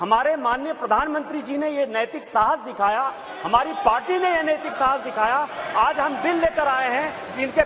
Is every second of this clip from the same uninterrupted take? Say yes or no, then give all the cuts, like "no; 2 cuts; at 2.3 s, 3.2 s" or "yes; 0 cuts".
yes; 0 cuts